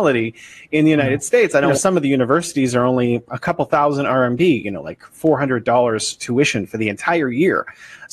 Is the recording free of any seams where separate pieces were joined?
no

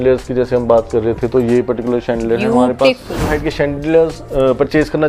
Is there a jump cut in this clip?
yes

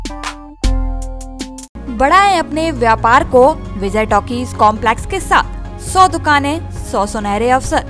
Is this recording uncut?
yes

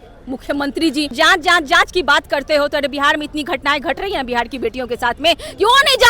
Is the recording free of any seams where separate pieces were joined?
no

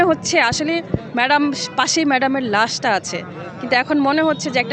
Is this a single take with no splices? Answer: yes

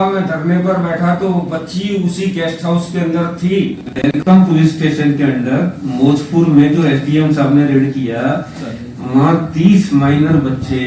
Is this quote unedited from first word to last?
no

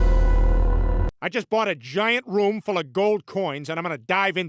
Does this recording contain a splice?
yes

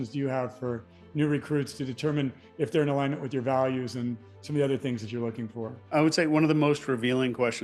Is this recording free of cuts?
yes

